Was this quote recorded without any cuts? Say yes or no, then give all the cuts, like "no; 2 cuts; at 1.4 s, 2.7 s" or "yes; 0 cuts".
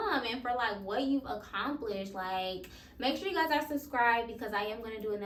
yes; 0 cuts